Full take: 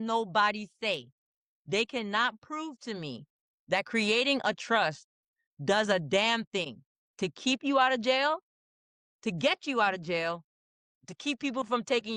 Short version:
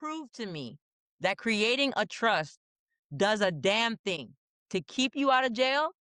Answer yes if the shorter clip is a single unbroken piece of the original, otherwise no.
yes